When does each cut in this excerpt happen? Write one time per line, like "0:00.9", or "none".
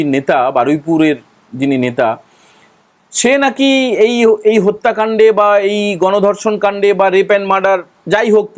none